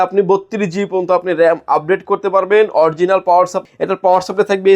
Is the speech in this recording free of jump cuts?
no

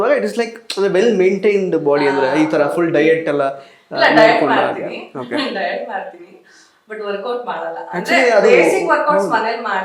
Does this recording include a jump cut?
no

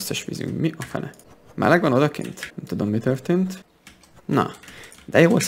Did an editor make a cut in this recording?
yes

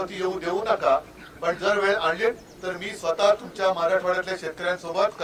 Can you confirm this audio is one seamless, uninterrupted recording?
yes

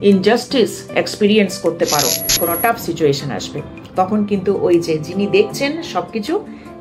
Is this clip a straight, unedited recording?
no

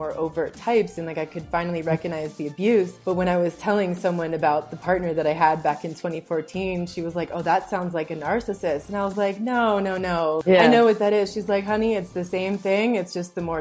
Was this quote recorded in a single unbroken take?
yes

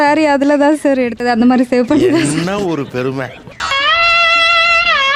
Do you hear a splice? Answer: no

